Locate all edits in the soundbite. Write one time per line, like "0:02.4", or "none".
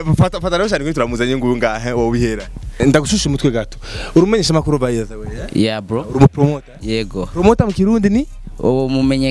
0:02.8